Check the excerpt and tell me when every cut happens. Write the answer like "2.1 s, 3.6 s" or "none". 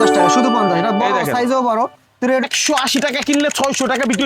2.4 s